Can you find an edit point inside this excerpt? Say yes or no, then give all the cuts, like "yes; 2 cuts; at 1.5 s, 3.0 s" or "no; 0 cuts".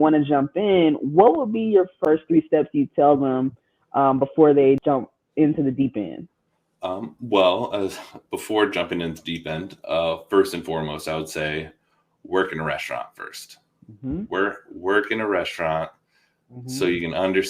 yes; 2 cuts; at 2.0 s, 4.8 s